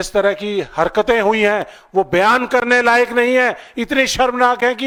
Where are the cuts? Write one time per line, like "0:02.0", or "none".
none